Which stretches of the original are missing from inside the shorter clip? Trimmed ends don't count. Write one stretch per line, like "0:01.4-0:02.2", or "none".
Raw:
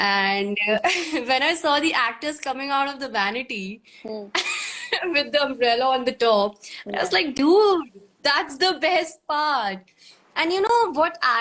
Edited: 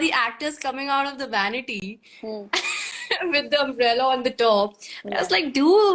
none